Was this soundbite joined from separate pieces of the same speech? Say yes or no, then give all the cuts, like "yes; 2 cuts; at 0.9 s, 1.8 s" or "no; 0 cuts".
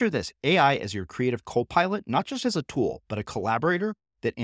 no; 0 cuts